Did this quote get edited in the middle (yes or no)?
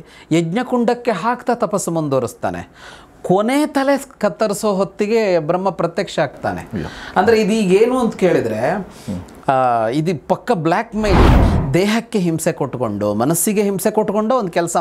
yes